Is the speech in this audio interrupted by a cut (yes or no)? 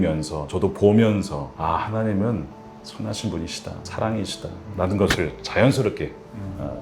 no